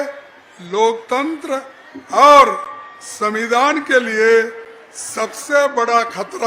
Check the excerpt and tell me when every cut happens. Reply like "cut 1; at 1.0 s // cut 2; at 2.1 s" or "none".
none